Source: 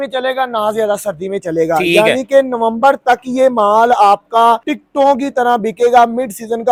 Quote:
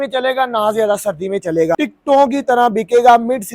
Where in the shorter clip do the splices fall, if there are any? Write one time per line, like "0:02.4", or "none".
0:01.7